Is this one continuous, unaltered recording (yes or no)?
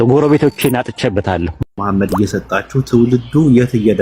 no